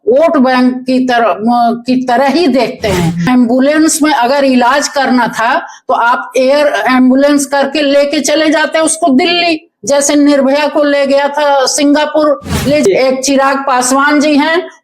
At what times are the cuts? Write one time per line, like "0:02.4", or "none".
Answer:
0:03.2
0:12.9

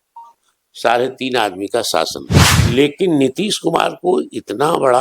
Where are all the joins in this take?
0:02.6

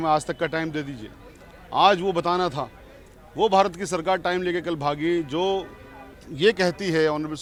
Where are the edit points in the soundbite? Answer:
none

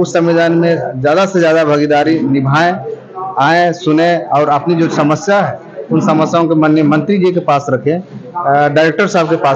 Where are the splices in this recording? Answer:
none

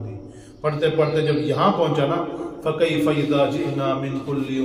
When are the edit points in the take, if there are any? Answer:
none

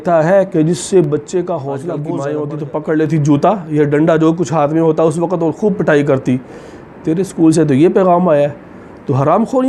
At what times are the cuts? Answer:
0:02.1

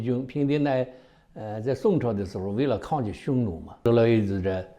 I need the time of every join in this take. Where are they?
0:03.8

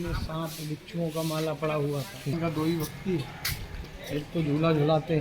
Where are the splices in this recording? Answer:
0:02.3

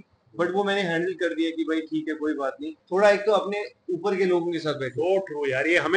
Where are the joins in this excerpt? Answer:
0:02.7

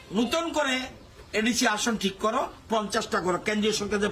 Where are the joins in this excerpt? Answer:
none

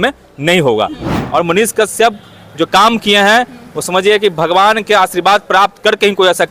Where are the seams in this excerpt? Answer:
0:01.1

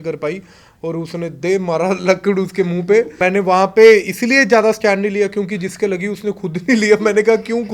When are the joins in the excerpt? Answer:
0:03.1

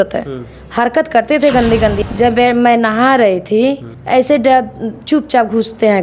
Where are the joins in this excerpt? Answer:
0:02.0
0:03.9

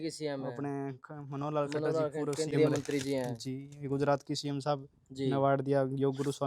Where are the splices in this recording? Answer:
none

